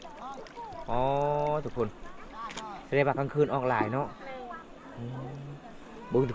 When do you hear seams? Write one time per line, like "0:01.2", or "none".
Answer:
none